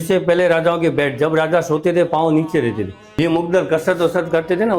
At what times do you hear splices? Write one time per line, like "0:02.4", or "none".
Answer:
0:03.0